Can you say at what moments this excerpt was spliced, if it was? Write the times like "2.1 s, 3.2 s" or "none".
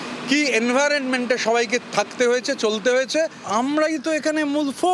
3.4 s

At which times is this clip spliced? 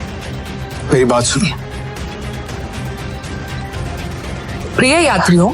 2.5 s

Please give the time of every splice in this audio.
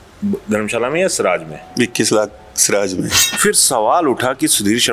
3.2 s

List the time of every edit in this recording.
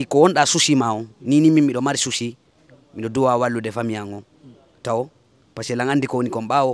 none

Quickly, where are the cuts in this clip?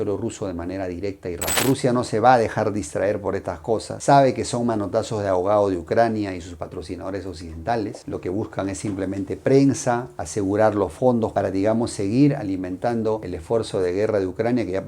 1.5 s

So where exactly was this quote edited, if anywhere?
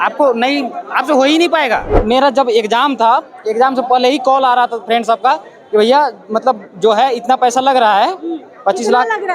2.0 s

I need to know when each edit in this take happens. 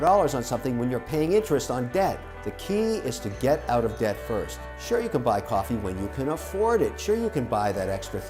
none

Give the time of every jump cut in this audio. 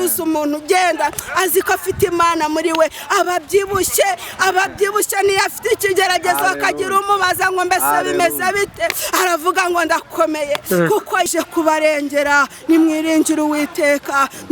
11.3 s

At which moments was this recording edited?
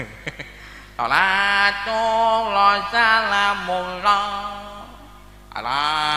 none

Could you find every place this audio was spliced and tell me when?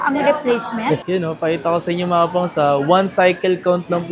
1.0 s

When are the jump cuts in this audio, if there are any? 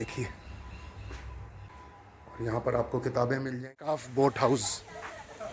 1.7 s, 3.6 s

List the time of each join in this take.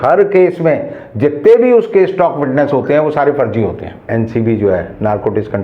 4.0 s

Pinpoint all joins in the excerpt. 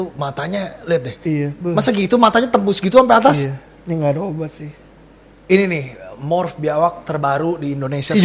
none

